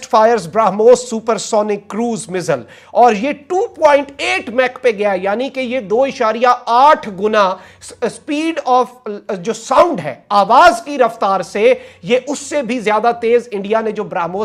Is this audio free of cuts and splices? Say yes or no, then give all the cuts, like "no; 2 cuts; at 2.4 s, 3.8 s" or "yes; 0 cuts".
yes; 0 cuts